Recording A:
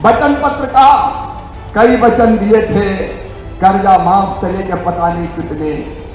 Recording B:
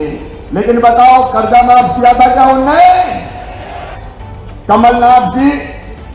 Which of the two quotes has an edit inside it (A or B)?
B